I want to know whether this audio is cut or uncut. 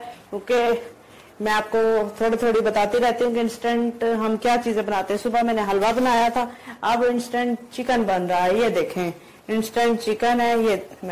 uncut